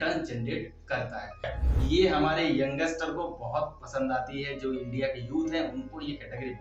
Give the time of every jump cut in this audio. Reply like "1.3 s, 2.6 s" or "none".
1.5 s